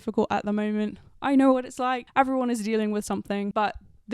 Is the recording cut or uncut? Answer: cut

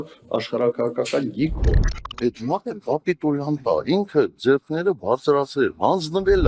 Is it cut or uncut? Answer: uncut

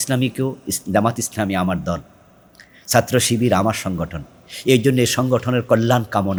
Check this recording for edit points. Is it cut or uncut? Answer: uncut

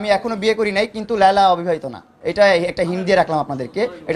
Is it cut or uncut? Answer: uncut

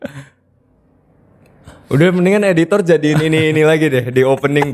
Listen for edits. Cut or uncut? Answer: cut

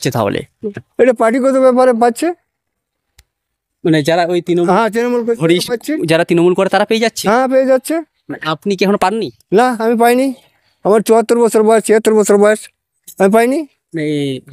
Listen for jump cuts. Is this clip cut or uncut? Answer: uncut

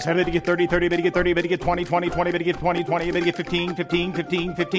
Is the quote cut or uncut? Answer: uncut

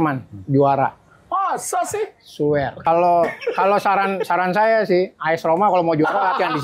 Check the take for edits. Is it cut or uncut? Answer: cut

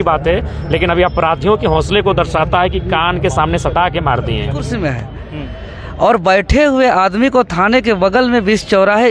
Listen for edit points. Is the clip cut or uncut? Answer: cut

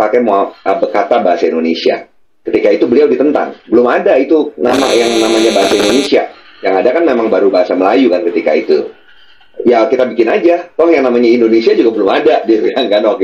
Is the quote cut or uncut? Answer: uncut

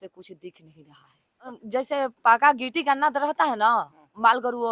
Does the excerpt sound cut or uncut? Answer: cut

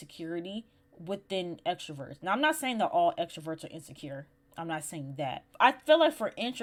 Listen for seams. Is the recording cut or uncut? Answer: uncut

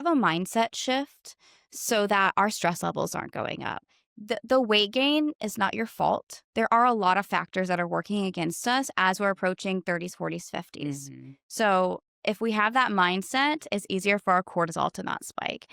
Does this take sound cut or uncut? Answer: uncut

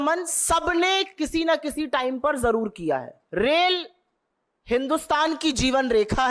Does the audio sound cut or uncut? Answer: cut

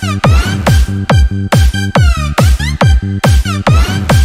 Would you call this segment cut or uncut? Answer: uncut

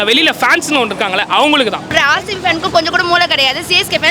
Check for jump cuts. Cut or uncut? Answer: cut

